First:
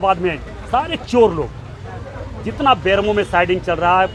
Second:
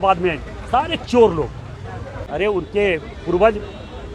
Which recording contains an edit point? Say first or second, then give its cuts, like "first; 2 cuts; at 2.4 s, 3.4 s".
second; 1 cut; at 2.2 s